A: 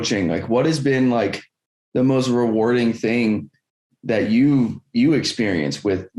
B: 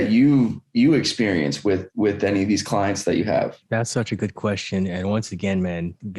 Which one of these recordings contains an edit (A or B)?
B